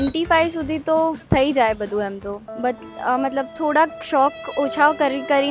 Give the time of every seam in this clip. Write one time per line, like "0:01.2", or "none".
0:02.5